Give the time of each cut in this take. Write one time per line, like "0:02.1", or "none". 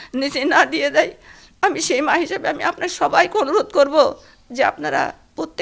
none

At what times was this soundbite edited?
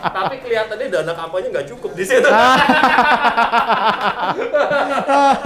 none

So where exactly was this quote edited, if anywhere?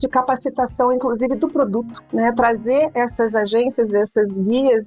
0:02.0

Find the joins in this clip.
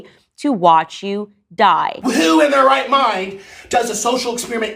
0:01.9

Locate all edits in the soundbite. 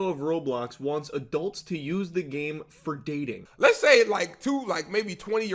0:03.4

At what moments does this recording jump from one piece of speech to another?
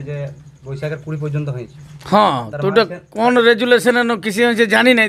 none

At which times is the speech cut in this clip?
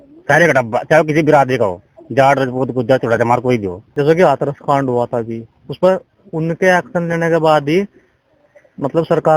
0:03.8

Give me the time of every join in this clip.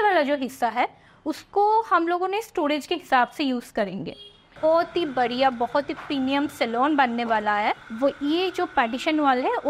0:04.5
0:07.9

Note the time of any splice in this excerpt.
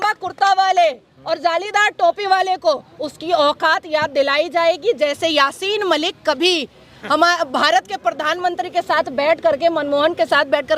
none

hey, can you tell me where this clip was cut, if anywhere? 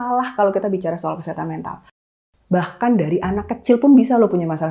0:02.1

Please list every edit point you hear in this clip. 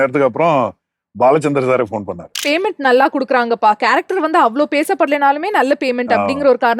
0:02.4

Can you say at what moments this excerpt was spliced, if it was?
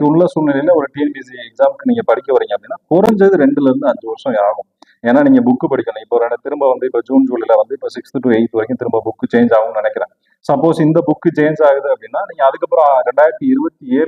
none

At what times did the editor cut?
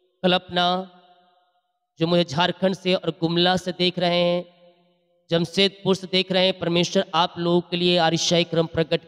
none

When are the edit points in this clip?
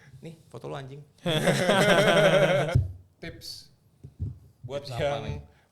0:02.7

